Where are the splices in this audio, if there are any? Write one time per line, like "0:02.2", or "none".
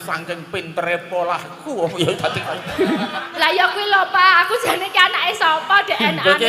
0:03.2